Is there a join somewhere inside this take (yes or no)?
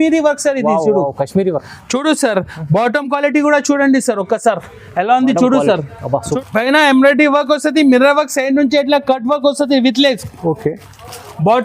yes